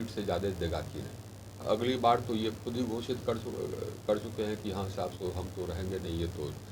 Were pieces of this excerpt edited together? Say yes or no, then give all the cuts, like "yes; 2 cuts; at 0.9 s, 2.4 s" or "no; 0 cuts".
yes; 1 cut; at 1.6 s